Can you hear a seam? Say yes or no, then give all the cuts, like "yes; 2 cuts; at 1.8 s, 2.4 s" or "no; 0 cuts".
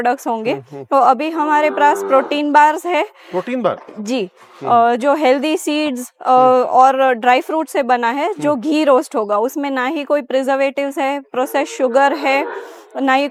no; 0 cuts